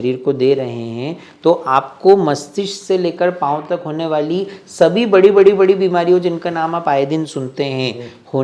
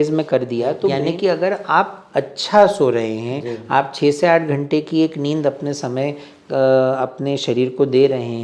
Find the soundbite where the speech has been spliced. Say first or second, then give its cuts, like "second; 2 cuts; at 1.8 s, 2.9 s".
second; 1 cut; at 0.9 s